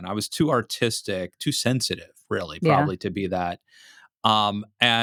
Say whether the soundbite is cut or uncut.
uncut